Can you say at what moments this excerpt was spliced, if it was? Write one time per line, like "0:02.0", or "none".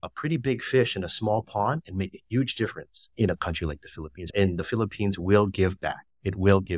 none